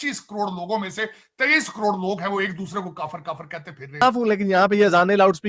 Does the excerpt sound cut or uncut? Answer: cut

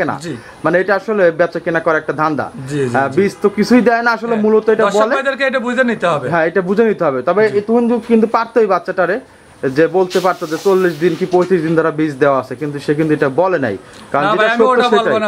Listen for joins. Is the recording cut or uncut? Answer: uncut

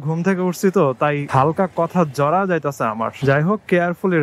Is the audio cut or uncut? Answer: cut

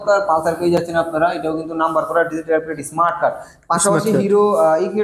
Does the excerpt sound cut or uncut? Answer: uncut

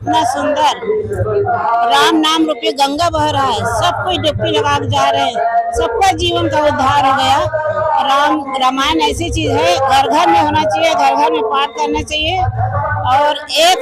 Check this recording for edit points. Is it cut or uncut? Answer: uncut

